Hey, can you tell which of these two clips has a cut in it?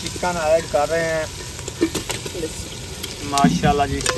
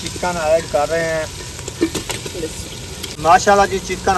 second; 1 cut; at 3.1 s

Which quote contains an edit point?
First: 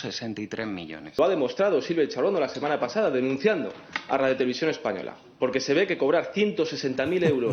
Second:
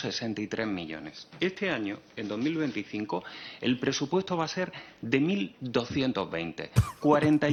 first; 1 cut; at 1.1 s

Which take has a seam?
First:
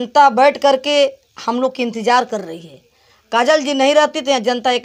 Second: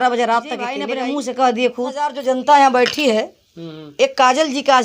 second; 2 cuts; at 0.8 s, 2.2 s

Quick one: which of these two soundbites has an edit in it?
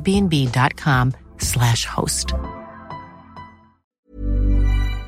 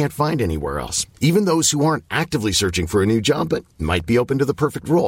first; 1 cut; at 4.0 s

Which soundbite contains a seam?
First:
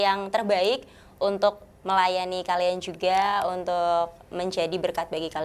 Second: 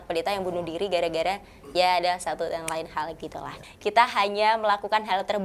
second; 1 cut; at 3.6 s

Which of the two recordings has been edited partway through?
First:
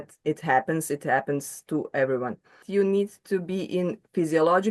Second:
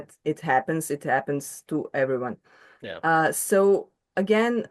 first; 1 cut; at 2.7 s

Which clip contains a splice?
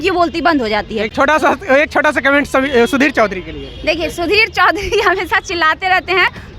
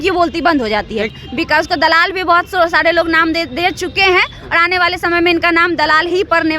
second; 1 cut; at 1.1 s

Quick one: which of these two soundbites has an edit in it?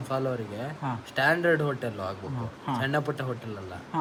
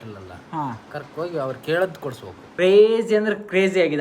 second; 1 cut; at 2.4 s

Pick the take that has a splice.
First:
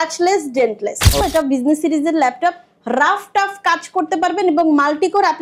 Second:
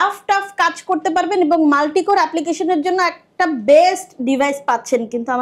first; 1 cut; at 1.2 s

